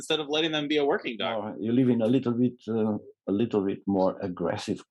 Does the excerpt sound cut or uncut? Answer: cut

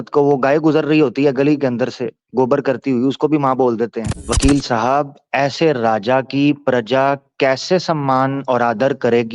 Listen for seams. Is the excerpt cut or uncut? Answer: cut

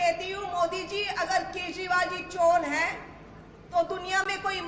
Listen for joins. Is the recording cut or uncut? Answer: uncut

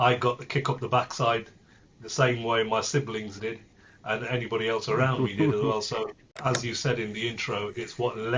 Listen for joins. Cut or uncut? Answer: cut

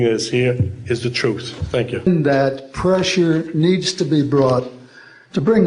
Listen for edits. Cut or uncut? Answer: cut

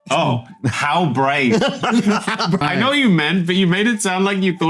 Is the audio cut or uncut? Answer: cut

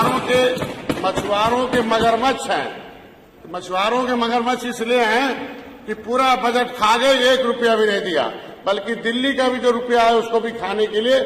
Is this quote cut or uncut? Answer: uncut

